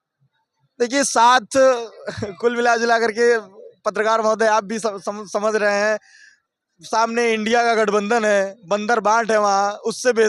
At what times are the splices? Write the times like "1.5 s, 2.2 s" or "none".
none